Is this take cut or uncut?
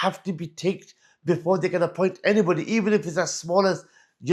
uncut